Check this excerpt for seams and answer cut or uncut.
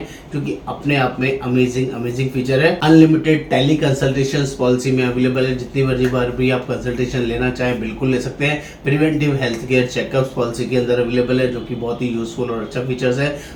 uncut